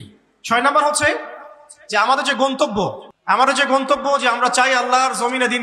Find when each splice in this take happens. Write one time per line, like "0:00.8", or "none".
0:03.1